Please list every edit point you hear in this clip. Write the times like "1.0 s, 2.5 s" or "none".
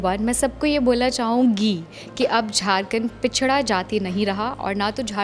none